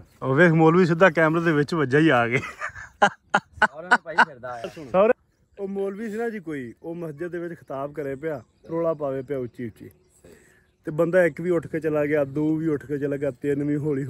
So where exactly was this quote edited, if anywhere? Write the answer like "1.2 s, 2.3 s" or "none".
5.1 s